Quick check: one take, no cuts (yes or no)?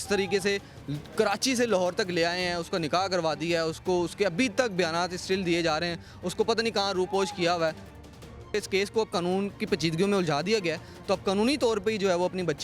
no